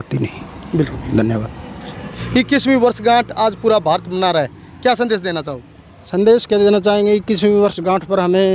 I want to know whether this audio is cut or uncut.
cut